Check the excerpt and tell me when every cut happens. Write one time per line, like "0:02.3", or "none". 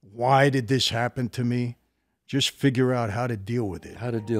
none